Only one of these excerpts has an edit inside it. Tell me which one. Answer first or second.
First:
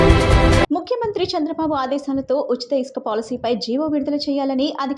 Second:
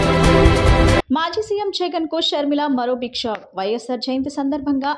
second